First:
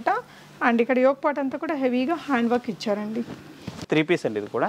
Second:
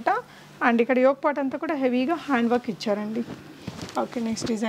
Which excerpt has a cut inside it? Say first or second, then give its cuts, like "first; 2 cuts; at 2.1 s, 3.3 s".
first; 1 cut; at 3.8 s